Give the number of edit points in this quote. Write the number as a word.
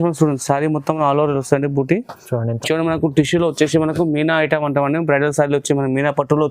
one